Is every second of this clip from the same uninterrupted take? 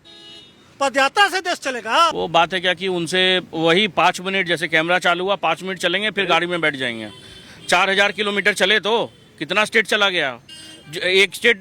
no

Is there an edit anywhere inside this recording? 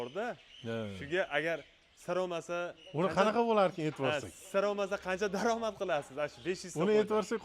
no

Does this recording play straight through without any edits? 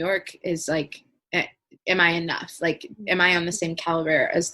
yes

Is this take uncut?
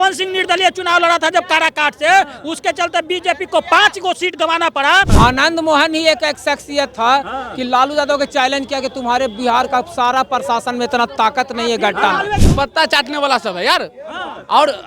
no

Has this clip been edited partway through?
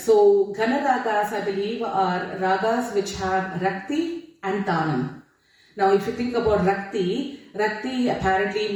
no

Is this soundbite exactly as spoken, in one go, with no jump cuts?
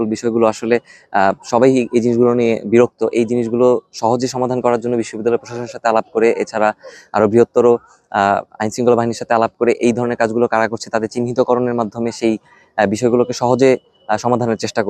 yes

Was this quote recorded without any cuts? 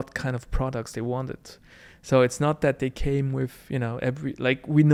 yes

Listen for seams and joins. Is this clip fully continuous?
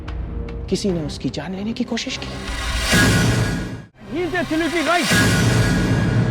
no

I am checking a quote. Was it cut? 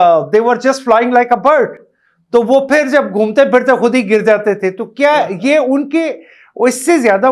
no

